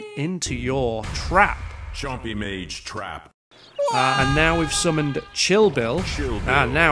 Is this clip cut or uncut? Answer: cut